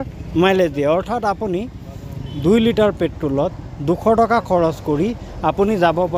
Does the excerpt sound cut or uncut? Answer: uncut